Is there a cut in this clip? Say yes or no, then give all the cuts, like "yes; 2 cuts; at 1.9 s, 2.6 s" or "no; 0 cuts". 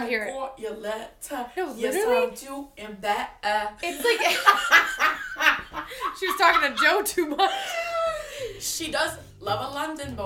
yes; 1 cut; at 9.3 s